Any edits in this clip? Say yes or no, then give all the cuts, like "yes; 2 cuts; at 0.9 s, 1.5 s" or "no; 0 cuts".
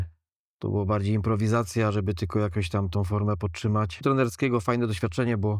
yes; 1 cut; at 4.0 s